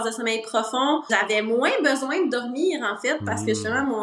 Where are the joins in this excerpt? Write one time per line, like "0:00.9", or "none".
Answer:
0:01.1